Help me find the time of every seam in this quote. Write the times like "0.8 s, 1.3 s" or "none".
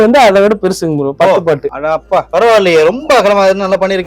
none